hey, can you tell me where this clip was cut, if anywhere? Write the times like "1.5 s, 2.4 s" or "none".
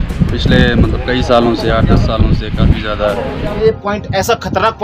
3.3 s